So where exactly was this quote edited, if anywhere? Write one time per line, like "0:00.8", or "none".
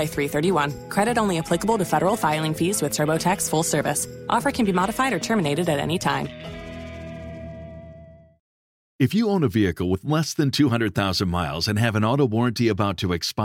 none